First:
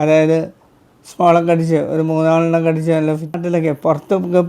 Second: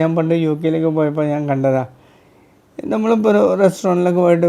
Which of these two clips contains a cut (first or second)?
first